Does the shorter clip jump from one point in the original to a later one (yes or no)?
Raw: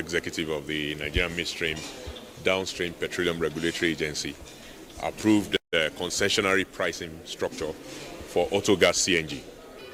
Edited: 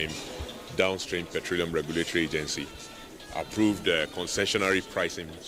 yes